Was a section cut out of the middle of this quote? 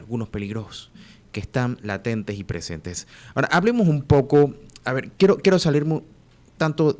no; 0 cuts

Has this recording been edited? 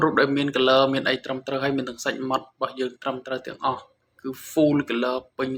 no; 0 cuts

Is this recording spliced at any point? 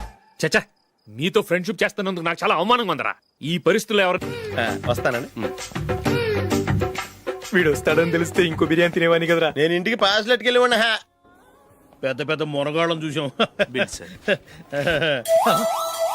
yes; 1 cut; at 4.2 s

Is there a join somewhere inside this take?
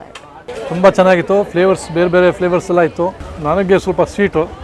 yes; 1 cut; at 3.3 s

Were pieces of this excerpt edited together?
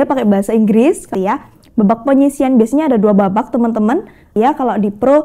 yes; 2 cuts; at 1.1 s, 4.3 s

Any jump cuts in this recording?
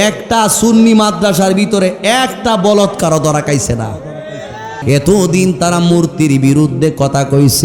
yes; 1 cut; at 4.8 s

